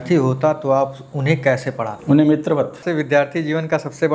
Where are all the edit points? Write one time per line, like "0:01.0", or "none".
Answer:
0:01.9
0:02.8